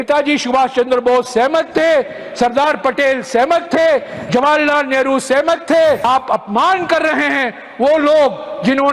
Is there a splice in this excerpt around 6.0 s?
yes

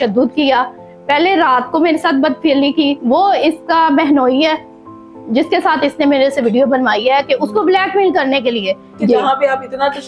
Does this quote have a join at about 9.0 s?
yes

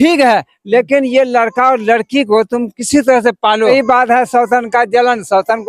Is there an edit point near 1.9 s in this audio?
no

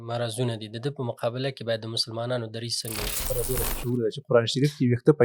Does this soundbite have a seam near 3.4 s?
yes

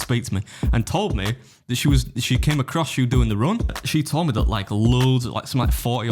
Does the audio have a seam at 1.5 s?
no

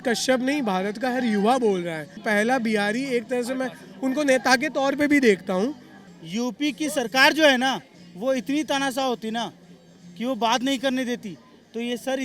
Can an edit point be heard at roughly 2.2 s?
yes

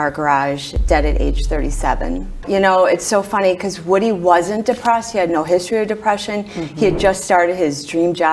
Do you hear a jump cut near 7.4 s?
no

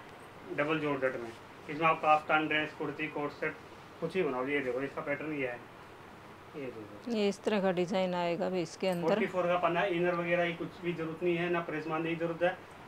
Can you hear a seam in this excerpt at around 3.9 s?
no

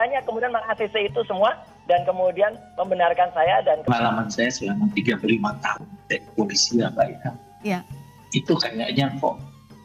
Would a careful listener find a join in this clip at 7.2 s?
no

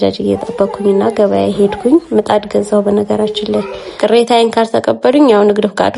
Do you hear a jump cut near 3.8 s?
yes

